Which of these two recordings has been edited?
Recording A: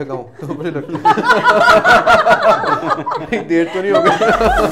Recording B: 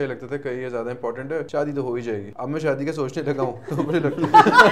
B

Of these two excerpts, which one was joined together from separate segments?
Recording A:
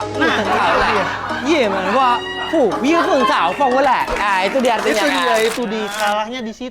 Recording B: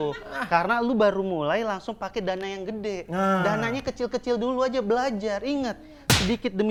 A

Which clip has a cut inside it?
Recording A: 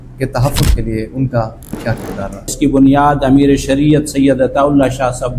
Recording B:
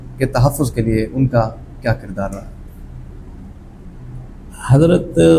A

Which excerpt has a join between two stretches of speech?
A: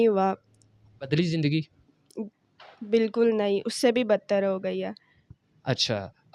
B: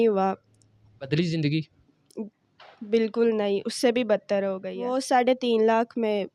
B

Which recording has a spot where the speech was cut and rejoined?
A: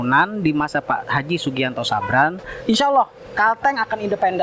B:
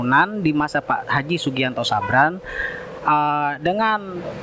A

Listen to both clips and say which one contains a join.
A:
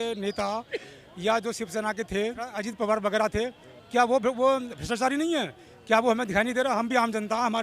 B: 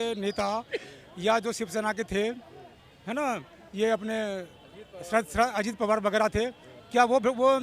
A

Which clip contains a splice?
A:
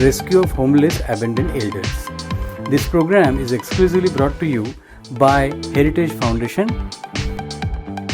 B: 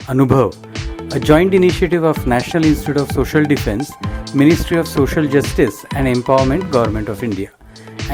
A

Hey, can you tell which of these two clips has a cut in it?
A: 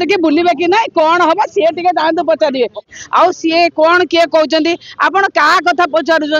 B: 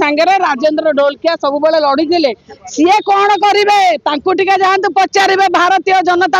A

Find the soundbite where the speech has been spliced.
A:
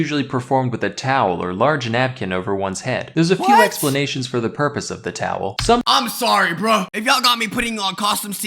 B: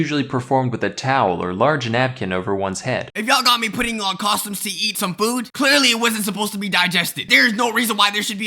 B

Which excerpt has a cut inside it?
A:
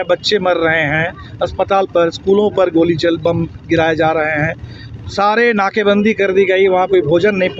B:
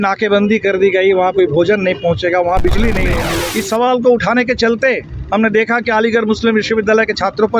B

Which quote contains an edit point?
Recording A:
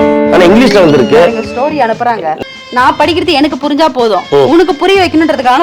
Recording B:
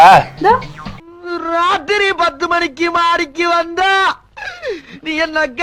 A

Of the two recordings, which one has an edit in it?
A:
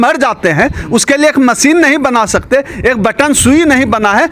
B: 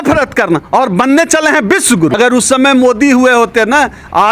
B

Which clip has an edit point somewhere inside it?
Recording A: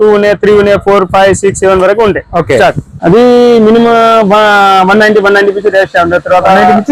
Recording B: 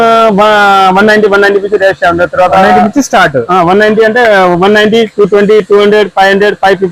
A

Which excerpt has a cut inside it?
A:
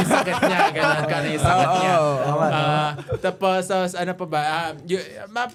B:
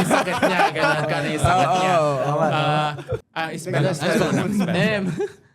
B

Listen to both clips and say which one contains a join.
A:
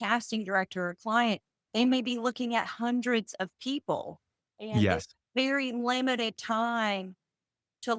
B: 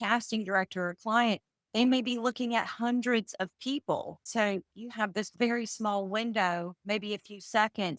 B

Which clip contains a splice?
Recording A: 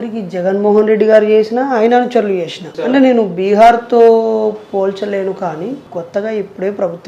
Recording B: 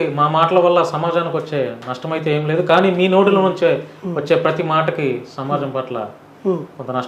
A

